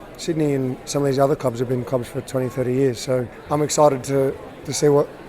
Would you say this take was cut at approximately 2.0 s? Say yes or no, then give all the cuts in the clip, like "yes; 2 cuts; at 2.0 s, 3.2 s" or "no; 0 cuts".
no; 1 cut; at 3.4 s